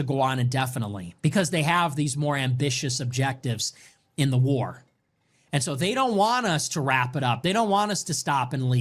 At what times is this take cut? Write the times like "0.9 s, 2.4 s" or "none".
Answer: none